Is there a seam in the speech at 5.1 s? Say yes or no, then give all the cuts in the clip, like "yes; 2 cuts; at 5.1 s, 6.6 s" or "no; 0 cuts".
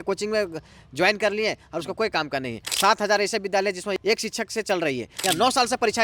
yes; 3 cuts; at 2.6 s, 3.9 s, 5.1 s